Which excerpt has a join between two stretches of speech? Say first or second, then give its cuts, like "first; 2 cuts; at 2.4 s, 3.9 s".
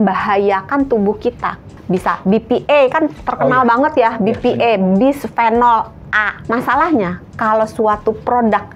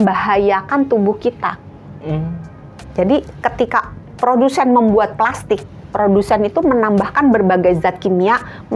first; 2 cuts; at 1.7 s, 6.4 s